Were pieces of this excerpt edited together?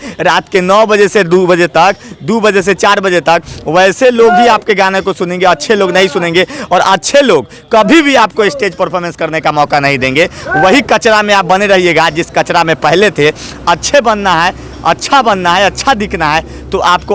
no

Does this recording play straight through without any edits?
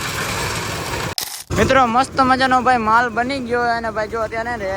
no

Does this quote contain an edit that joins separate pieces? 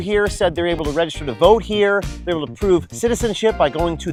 no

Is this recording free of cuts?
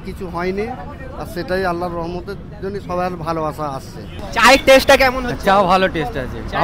no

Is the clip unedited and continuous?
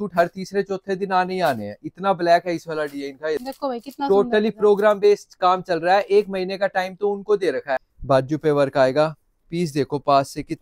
no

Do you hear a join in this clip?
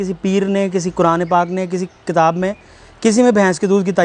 no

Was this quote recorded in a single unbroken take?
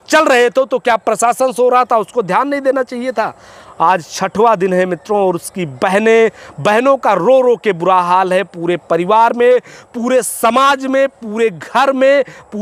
yes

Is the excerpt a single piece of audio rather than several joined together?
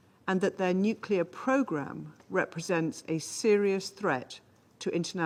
yes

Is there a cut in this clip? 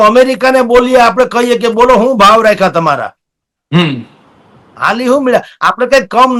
no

